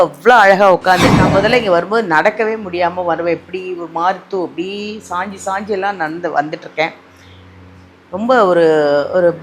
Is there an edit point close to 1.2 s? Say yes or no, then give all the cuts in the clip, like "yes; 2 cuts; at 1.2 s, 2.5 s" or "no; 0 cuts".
yes; 1 cut; at 1.2 s